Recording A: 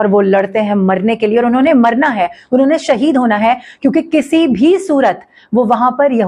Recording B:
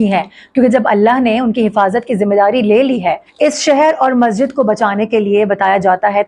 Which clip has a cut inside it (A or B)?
B